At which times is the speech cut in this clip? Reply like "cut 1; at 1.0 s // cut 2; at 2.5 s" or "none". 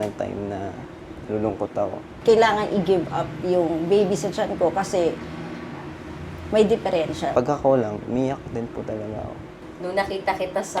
cut 1; at 2.1 s // cut 2; at 7.3 s // cut 3; at 9.5 s